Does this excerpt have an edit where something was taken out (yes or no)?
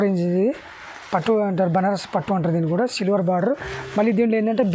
no